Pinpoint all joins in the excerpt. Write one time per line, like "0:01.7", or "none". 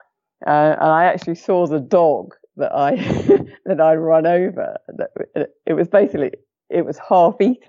none